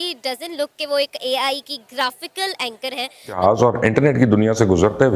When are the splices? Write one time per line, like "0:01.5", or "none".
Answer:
0:03.4